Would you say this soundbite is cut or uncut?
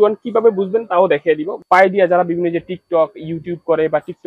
cut